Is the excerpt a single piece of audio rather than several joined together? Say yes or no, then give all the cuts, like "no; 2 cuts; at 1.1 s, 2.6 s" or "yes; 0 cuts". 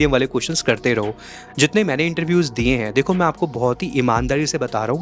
yes; 0 cuts